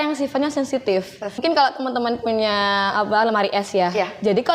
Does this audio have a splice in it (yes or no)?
yes